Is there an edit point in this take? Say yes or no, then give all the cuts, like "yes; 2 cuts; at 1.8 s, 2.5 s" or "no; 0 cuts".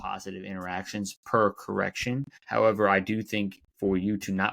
yes; 2 cuts; at 2.3 s, 3.6 s